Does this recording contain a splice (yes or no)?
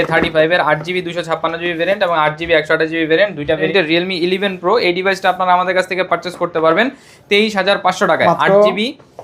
yes